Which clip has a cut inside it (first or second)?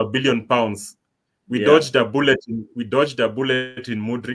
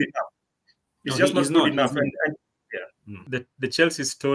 second